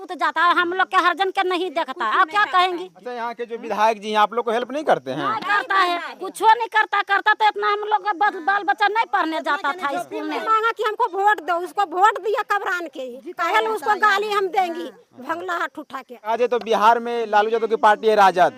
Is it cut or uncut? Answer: cut